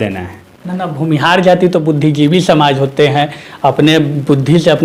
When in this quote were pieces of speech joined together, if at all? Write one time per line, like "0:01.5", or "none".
none